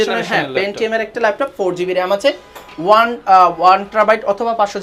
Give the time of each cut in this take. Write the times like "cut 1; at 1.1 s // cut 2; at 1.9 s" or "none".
none